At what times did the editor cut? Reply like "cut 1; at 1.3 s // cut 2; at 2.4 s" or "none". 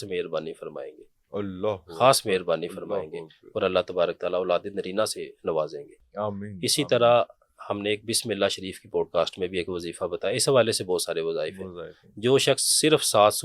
none